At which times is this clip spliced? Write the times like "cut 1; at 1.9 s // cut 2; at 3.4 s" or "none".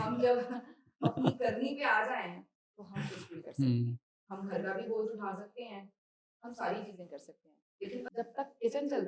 cut 1; at 8.1 s